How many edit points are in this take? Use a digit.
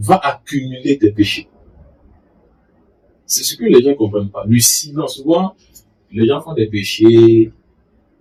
0